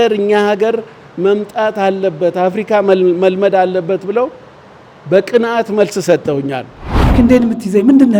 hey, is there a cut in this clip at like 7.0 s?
yes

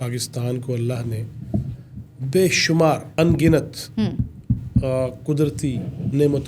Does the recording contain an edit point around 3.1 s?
yes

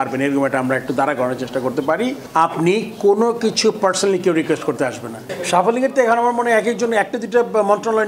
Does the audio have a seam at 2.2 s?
yes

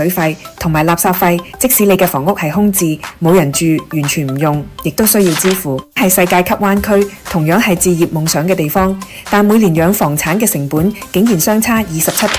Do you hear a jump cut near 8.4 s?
no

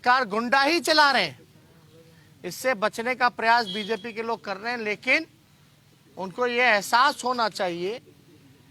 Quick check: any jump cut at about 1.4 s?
no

